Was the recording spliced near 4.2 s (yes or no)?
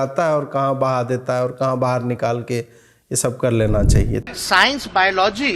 yes